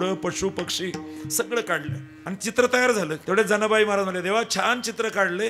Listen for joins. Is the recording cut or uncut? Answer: cut